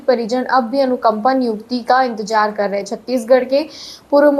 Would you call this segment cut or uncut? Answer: uncut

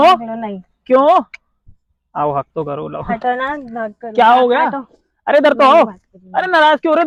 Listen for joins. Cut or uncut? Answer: uncut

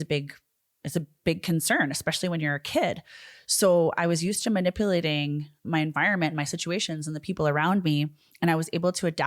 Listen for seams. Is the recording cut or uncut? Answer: uncut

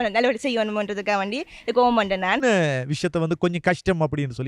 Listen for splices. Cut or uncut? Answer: cut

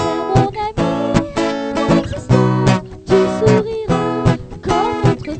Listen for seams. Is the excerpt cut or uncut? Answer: uncut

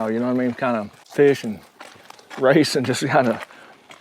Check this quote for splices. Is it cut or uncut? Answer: cut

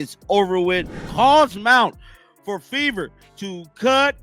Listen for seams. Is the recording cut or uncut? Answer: cut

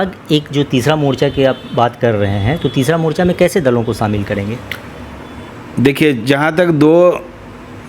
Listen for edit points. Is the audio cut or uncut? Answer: uncut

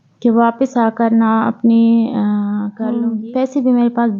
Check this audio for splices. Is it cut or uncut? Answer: cut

